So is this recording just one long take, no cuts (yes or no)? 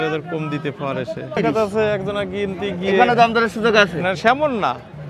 no